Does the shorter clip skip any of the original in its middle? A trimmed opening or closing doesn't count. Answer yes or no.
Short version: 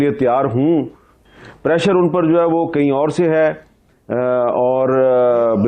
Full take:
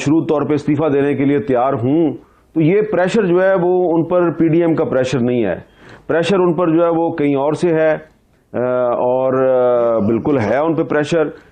yes